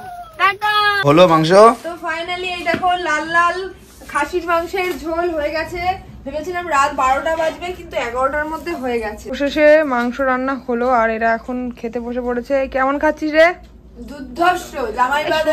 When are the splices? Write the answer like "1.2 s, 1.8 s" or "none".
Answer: 1.0 s, 9.3 s